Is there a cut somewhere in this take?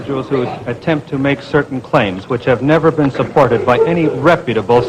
no; 0 cuts

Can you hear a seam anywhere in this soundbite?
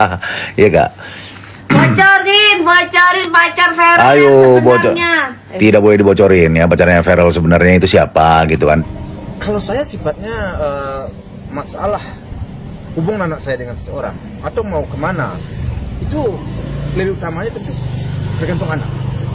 yes; 1 cut; at 8.8 s

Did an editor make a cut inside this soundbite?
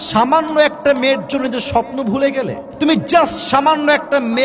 yes; 1 cut; at 2.6 s

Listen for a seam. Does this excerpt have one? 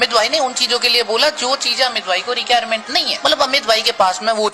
no; 0 cuts

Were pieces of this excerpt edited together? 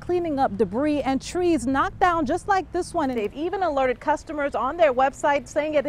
yes; 1 cut; at 3.2 s

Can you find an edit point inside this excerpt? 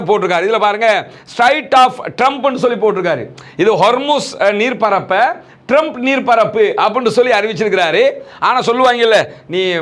no; 0 cuts

